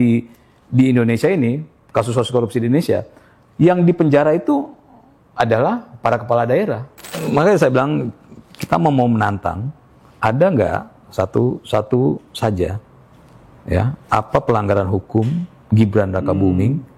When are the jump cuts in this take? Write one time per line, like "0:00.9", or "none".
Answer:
0:07.2